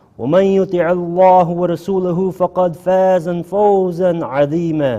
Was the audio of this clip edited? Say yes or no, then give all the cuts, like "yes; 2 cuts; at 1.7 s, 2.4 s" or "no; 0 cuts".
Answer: yes; 1 cut; at 3.8 s